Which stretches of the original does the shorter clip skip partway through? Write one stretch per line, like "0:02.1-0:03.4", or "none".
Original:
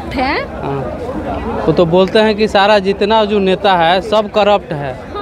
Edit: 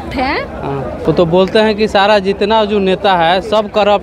0:01.0-0:01.6